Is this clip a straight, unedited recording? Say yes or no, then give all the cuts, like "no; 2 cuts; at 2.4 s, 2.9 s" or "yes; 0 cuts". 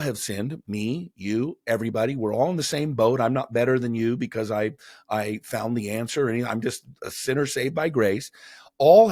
yes; 0 cuts